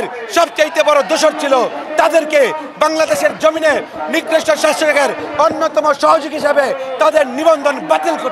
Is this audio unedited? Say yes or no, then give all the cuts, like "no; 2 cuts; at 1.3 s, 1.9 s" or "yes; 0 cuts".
yes; 0 cuts